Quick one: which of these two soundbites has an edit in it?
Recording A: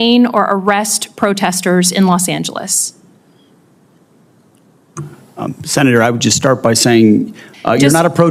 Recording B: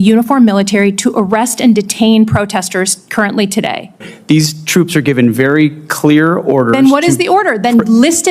B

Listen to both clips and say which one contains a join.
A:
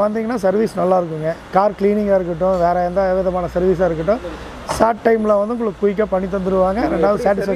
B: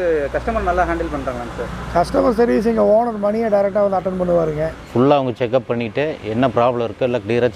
B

